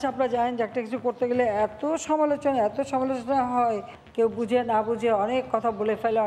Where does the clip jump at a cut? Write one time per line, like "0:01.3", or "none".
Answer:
0:04.0